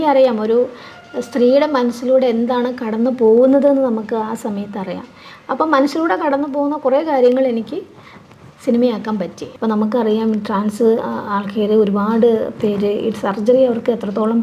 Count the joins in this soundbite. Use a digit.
1